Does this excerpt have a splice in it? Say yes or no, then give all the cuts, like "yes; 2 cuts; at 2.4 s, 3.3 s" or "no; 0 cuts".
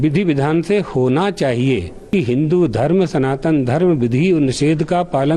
yes; 1 cut; at 2.1 s